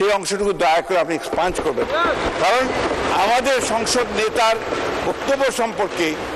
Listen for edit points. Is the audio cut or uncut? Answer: uncut